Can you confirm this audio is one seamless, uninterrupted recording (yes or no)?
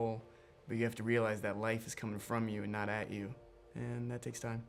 yes